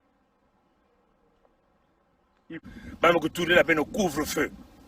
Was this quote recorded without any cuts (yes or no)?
no